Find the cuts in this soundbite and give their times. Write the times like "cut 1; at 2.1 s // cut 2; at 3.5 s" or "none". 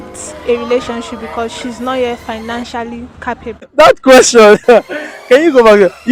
cut 1; at 3.6 s